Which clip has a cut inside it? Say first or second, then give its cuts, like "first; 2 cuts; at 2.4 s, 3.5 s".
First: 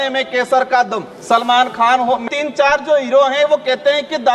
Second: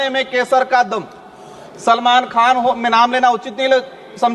first; 2 cuts; at 1.1 s, 2.2 s